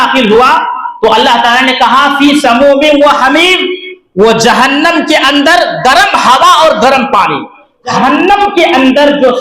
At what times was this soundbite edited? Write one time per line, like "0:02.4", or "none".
0:07.9